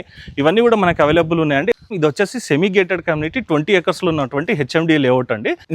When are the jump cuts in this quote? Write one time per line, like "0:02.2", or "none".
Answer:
0:01.9